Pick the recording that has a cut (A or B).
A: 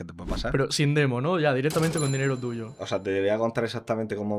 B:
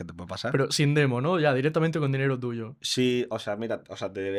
A